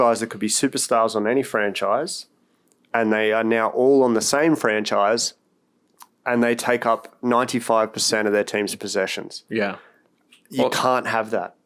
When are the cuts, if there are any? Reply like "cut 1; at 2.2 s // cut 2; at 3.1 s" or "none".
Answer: none